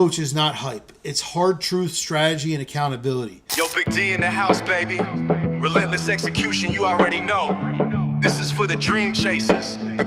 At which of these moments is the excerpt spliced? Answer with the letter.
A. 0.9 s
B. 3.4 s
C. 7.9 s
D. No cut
B